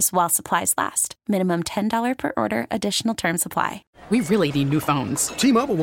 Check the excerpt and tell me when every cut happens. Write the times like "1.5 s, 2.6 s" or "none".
3.9 s